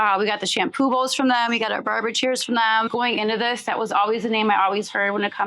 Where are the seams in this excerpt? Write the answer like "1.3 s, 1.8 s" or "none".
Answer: 2.9 s